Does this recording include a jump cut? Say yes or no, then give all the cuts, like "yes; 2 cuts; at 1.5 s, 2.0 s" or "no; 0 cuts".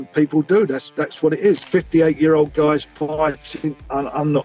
yes; 1 cut; at 1.6 s